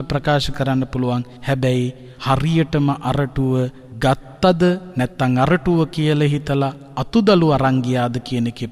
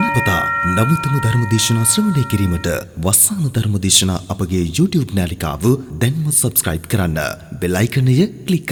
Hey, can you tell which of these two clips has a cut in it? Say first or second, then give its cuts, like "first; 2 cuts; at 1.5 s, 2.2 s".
first; 2 cuts; at 1.7 s, 3.8 s